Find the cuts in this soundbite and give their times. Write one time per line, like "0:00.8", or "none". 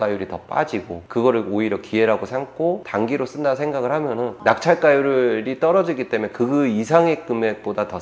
0:02.8
0:04.3